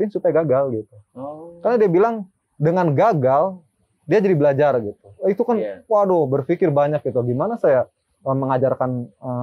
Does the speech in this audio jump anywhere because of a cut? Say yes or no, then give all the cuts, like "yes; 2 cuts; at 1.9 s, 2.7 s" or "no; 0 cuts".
no; 0 cuts